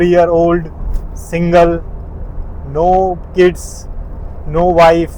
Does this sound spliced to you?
no; 0 cuts

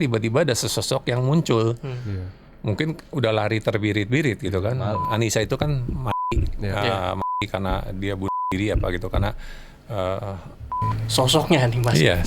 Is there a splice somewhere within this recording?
yes; 2 cuts; at 5.0 s, 10.7 s

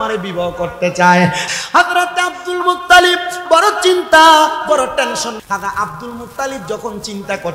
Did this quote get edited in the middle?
yes; 2 cuts; at 1.5 s, 5.4 s

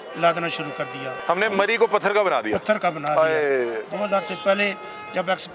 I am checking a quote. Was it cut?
yes; 2 cuts; at 1.2 s, 3.8 s

